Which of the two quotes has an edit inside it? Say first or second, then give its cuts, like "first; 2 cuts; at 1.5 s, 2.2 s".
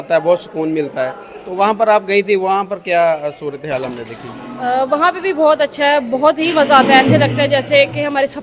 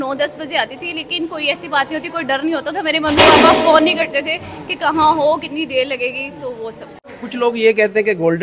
second; 1 cut; at 7.1 s